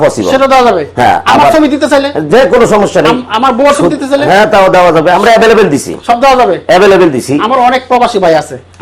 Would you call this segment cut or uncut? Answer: uncut